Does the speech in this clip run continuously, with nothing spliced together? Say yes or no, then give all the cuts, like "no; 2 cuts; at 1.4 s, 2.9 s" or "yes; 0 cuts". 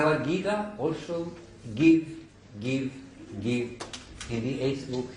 yes; 0 cuts